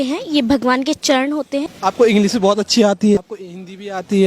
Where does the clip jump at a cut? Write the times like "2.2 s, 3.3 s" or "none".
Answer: 1.7 s, 3.2 s